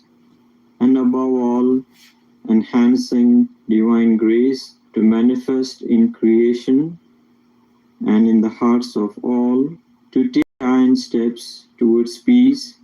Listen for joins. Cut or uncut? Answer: cut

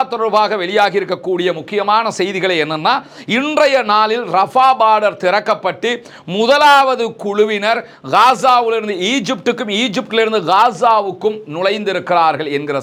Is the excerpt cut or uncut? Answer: uncut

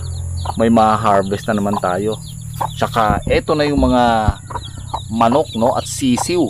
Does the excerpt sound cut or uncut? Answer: uncut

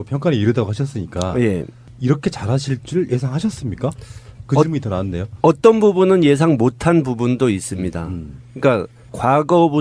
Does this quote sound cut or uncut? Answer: cut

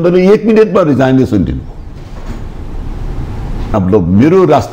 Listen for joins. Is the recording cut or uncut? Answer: cut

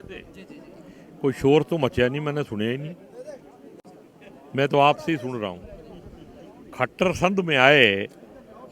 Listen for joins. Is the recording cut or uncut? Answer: uncut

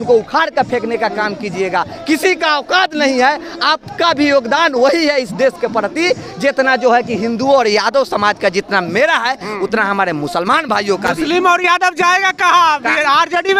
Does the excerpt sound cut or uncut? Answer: uncut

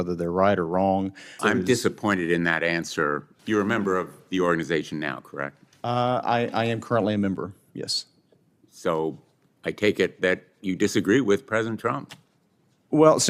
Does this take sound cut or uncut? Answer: cut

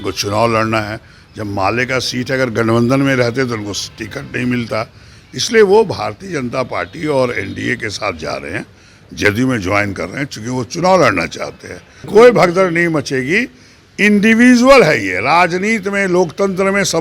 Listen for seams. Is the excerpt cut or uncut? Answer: cut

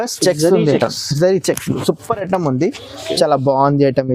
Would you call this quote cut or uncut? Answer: uncut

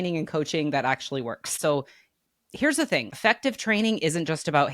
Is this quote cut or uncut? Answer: cut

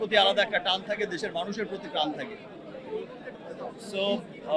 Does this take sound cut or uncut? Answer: uncut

